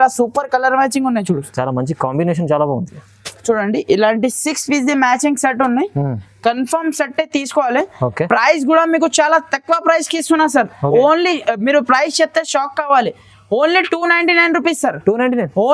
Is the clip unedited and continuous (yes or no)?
yes